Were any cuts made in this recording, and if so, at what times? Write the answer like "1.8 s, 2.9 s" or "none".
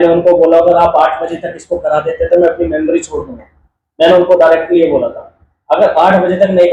none